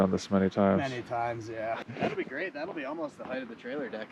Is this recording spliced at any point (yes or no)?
yes